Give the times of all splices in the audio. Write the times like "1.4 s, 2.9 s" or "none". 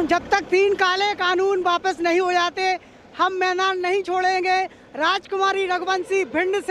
none